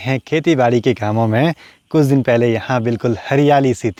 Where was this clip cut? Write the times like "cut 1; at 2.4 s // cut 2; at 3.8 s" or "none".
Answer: none